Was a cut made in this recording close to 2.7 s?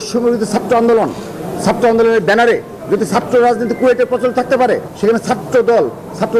no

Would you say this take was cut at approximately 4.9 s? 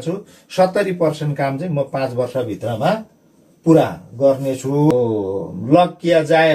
yes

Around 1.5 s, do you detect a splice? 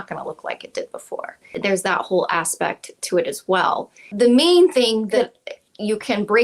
yes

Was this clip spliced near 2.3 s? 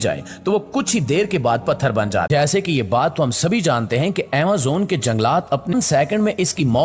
yes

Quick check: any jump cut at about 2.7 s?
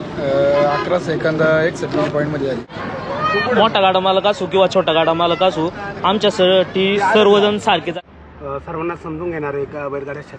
yes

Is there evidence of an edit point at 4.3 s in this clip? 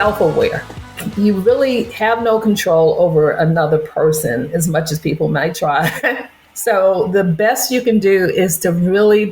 no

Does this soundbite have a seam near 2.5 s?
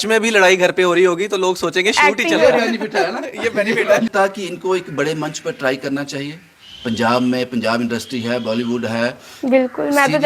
no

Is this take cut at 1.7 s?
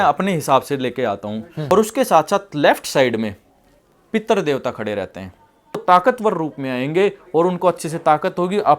yes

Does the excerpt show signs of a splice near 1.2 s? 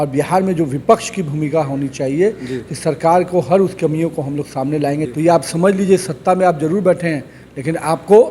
no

